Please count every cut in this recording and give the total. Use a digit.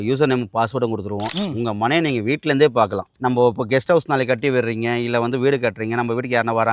1